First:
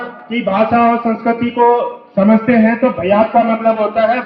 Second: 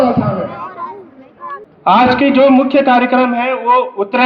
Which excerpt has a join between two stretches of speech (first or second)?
second